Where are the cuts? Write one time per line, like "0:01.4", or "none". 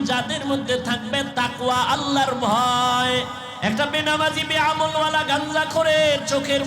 0:03.4